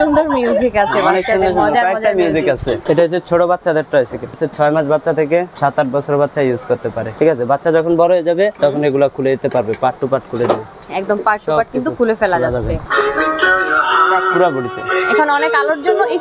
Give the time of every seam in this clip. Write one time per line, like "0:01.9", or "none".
0:02.8
0:04.4
0:05.5
0:07.1
0:08.5
0:10.8
0:12.8

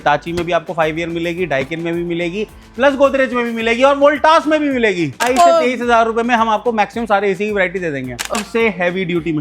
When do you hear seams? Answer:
0:05.2
0:08.4

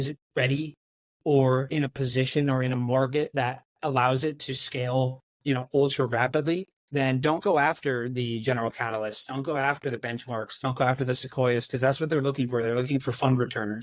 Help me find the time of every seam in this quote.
0:06.8

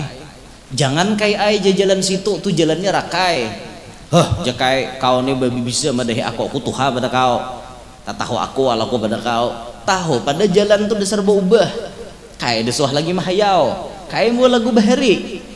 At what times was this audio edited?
none

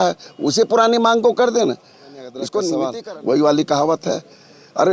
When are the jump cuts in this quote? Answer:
0:02.9

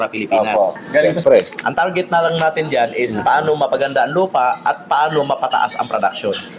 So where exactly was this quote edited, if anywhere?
0:01.1

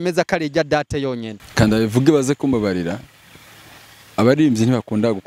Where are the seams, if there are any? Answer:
0:01.4

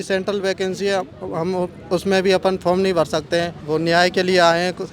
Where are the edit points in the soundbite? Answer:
0:03.6

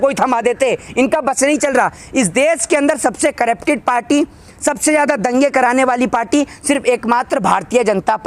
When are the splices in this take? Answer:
none

